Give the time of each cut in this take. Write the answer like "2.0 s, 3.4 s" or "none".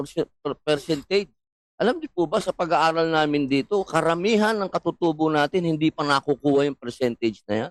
none